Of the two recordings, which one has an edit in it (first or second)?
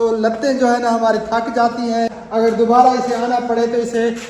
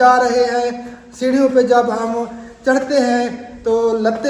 first